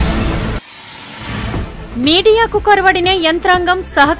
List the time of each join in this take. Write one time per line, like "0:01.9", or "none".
none